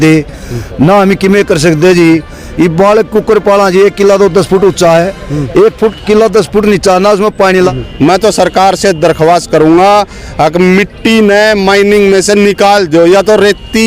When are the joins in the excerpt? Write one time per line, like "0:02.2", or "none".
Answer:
0:07.7